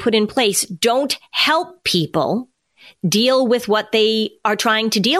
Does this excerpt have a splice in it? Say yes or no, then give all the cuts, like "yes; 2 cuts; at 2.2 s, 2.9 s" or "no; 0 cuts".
no; 0 cuts